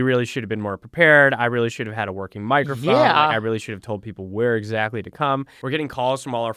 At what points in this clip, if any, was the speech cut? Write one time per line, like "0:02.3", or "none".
0:05.5

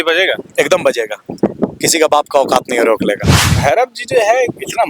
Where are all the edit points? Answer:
0:03.5

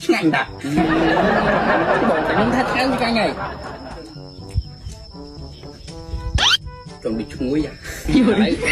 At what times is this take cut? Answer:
none

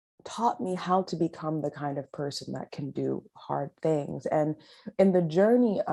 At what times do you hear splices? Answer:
none

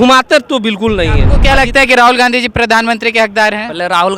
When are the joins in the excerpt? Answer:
0:01.3

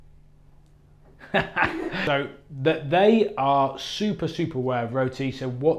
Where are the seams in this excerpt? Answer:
0:02.1

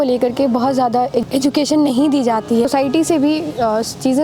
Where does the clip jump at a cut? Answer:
0:01.3
0:02.7

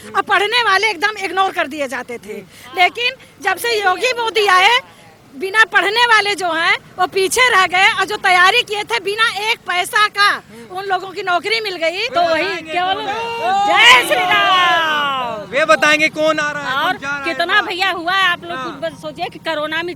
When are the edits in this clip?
0:12.0

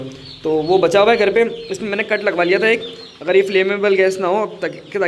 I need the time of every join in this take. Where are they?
none

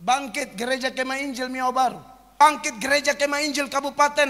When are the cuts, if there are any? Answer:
0:02.3

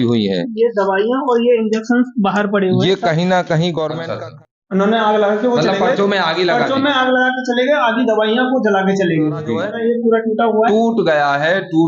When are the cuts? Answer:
0:04.0
0:09.6

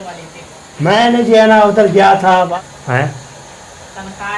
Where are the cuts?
0:02.5

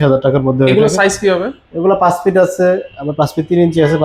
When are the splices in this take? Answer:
none

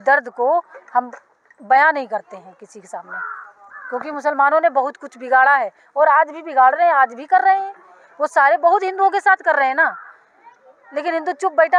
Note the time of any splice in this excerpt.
none

